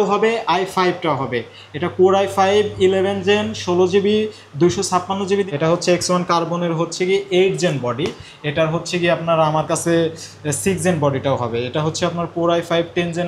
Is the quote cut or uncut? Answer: cut